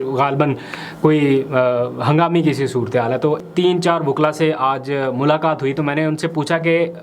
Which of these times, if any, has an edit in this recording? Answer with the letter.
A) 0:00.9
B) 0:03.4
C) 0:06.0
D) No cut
B